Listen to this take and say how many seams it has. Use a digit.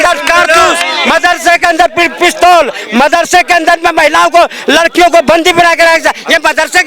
0